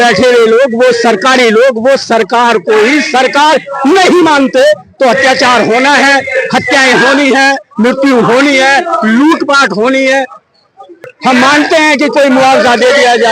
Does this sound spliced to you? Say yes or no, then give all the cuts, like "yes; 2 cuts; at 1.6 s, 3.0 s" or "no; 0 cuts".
yes; 1 cut; at 11.0 s